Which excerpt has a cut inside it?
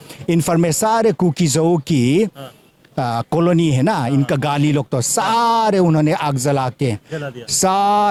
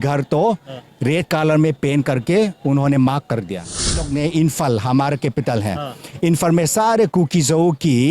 second; 1 cut; at 4.0 s

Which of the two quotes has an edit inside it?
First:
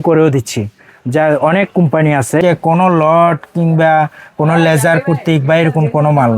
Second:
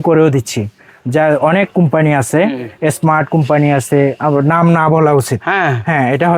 first; 1 cut; at 2.4 s

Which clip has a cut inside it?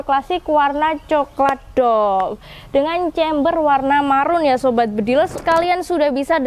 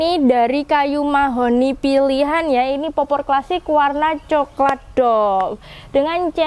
first; 1 cut; at 5.4 s

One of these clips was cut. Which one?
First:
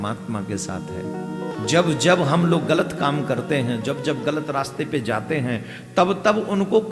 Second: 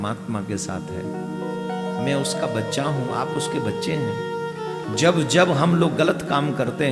first; 1 cut; at 1.5 s

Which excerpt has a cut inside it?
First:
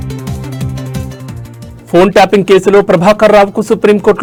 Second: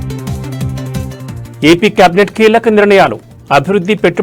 second; 1 cut; at 1.0 s

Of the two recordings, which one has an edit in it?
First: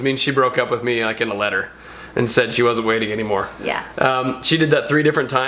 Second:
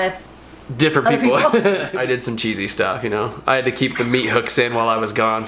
second; 1 cut; at 1.9 s

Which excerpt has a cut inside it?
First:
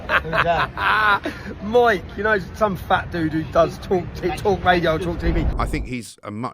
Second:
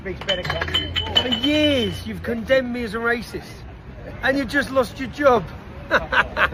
first; 1 cut; at 5.6 s

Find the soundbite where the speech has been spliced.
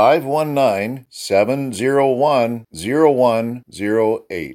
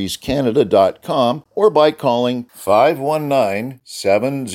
second; 1 cut; at 1.4 s

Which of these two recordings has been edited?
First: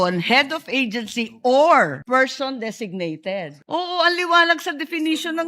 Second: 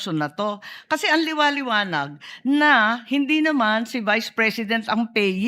first; 2 cuts; at 2.0 s, 3.6 s

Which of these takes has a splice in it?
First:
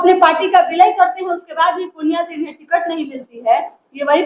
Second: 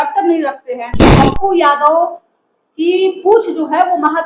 second; 1 cut; at 1.1 s

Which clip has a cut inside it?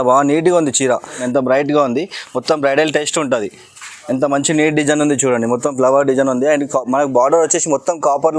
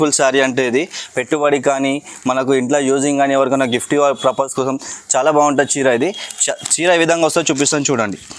first; 1 cut; at 1.2 s

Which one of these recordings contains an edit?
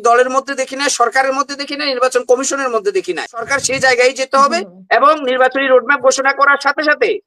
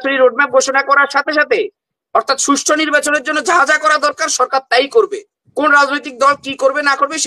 first; 1 cut; at 3.5 s

